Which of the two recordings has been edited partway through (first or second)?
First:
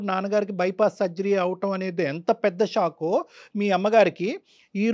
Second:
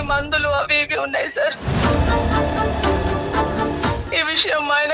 second